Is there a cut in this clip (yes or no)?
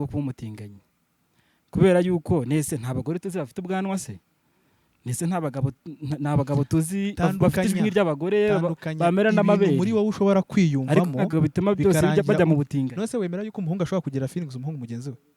no